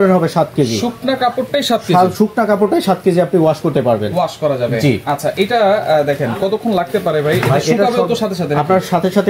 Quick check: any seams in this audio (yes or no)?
no